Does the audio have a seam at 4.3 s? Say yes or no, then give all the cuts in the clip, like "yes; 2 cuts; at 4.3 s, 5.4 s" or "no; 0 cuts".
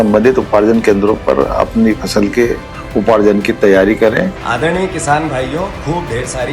yes; 1 cut; at 4.3 s